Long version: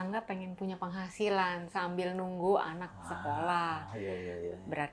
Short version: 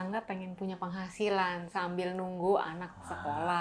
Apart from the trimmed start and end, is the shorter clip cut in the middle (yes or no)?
no